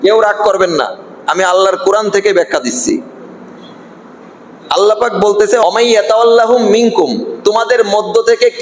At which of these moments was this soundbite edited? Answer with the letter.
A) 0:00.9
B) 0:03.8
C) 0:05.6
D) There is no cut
C